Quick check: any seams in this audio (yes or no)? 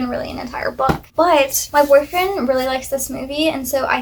no